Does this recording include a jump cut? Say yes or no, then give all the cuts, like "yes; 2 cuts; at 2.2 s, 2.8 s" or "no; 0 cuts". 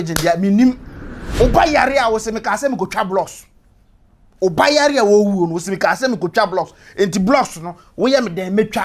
yes; 1 cut; at 1.2 s